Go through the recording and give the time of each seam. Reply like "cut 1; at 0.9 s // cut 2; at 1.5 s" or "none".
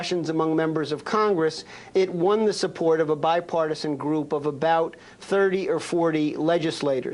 cut 1; at 1.7 s